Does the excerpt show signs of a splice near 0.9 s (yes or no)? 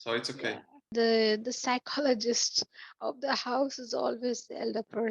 yes